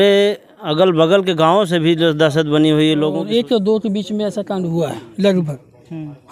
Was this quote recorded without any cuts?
no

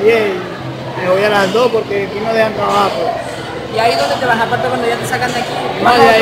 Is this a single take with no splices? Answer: yes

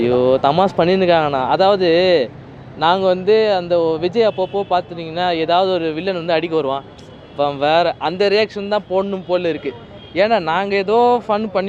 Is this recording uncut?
yes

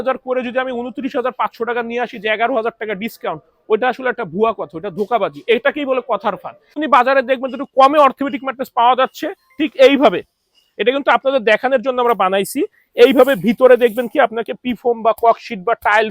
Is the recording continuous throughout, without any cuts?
no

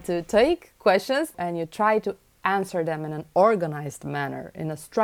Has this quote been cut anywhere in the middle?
yes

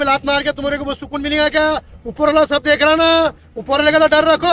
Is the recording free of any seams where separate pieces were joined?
yes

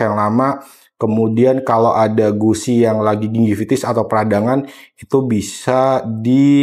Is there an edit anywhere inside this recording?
no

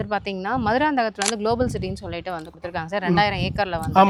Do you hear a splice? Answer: no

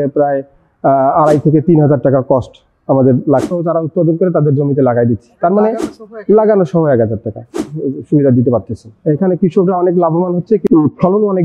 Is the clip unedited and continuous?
no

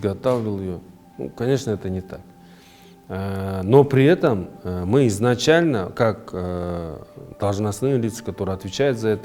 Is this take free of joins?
yes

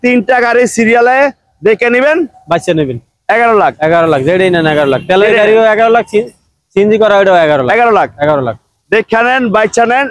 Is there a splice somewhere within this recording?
no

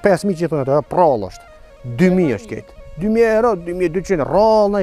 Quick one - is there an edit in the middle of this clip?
no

